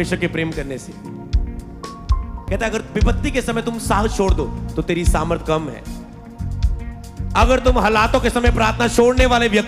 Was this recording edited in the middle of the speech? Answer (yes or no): yes